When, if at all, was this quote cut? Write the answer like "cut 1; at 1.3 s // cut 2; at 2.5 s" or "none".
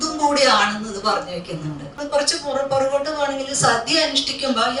cut 1; at 2.0 s